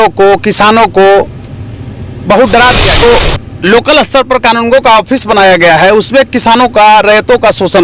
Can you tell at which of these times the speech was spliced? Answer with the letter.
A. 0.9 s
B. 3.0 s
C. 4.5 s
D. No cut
B